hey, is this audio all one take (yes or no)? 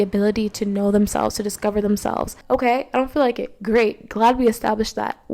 no